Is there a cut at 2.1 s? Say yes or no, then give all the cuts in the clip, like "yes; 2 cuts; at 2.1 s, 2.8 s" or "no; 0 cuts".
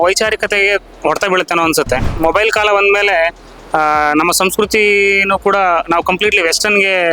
yes; 1 cut; at 2.1 s